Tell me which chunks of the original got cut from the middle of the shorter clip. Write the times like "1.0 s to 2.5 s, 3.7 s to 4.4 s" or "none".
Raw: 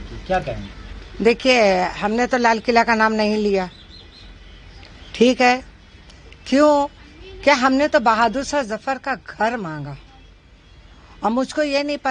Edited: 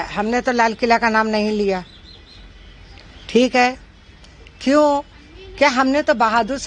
none